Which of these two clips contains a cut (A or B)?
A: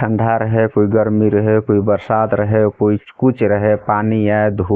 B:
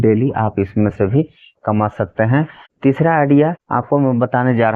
B